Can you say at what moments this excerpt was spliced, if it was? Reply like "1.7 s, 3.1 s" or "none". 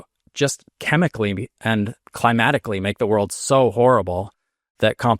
2.0 s